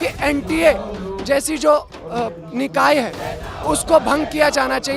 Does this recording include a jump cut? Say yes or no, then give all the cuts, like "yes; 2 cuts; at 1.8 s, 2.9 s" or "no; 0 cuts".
no; 0 cuts